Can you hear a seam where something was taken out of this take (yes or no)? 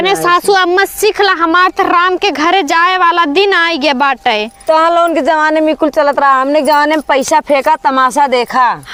no